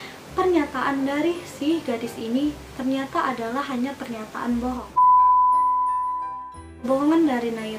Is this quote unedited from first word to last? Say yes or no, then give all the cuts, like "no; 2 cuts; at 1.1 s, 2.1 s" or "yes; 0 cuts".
no; 2 cuts; at 4.8 s, 6.8 s